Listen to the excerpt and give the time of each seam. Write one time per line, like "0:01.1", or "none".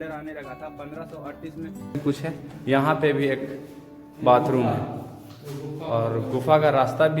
0:02.0